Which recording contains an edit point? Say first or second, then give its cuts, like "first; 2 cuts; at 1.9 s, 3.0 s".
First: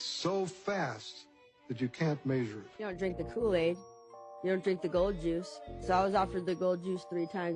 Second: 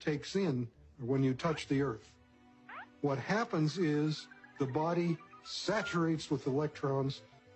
first; 1 cut; at 2.9 s